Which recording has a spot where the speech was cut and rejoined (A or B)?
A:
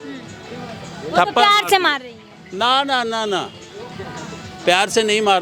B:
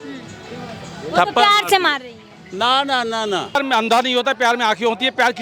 B